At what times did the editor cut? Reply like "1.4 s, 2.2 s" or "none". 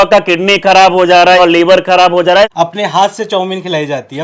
1.4 s, 2.5 s